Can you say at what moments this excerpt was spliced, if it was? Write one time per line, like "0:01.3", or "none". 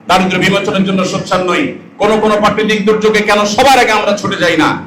none

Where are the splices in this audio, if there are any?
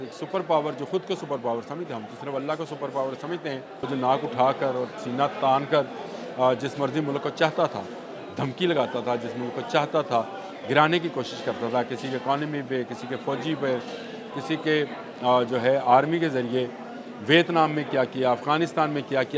0:03.9

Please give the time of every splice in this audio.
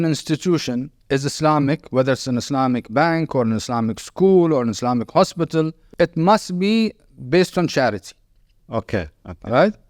0:00.9
0:05.8

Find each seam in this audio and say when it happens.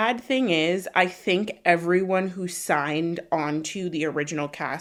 none

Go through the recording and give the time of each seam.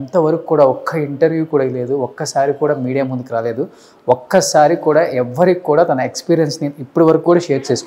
none

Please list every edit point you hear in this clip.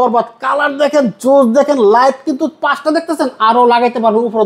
none

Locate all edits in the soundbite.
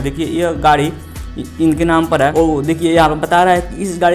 0:02.3

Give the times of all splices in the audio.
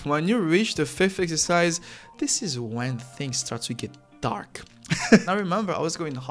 0:05.2

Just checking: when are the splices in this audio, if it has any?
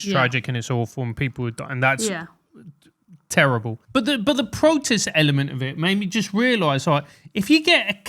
0:03.8

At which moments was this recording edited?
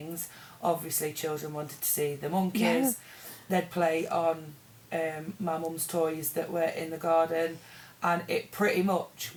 none

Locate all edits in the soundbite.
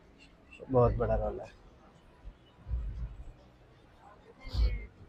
none

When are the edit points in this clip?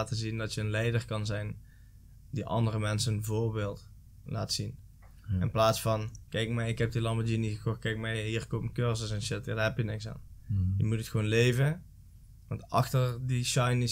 none

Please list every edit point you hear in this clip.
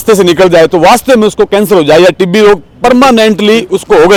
none

